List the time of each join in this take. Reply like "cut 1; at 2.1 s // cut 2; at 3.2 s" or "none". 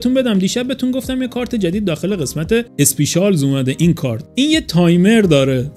none